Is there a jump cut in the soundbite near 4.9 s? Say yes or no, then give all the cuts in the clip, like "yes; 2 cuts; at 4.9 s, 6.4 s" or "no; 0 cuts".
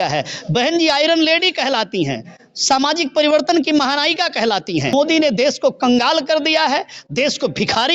yes; 1 cut; at 4.9 s